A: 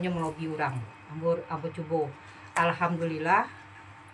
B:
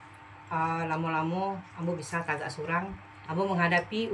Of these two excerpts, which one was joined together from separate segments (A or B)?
B